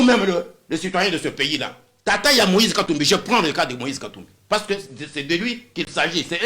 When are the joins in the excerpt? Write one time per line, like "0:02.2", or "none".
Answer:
0:01.9